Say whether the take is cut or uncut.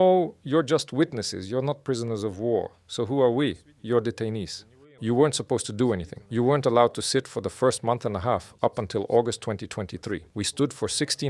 cut